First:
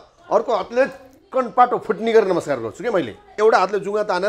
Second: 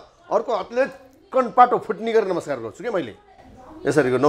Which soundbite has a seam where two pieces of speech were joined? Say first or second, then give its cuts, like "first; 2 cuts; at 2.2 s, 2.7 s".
first; 1 cut; at 3.3 s